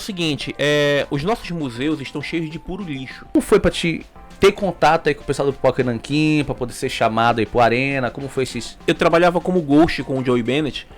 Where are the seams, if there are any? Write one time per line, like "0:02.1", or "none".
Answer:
0:03.3